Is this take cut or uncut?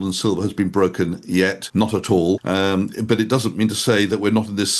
cut